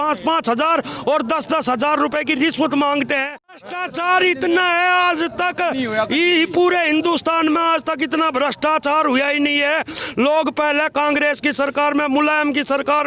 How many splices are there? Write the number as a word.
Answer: one